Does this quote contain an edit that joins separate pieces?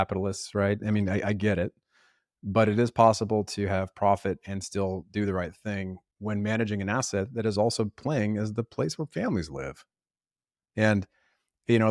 no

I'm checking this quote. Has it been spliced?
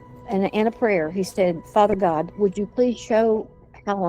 yes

